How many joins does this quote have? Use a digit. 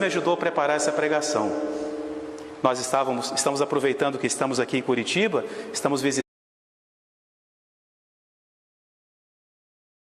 0